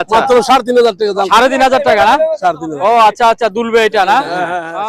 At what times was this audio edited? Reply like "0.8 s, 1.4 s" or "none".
none